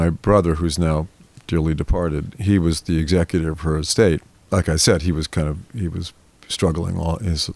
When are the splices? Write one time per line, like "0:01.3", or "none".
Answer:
0:04.3